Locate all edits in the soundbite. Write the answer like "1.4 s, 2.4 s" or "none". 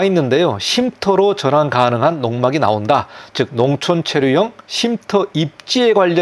none